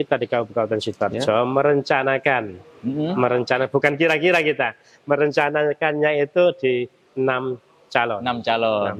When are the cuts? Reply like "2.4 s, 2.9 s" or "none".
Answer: none